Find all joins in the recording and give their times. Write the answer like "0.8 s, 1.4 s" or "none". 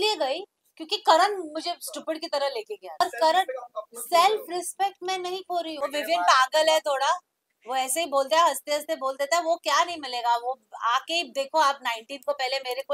3.0 s, 5.7 s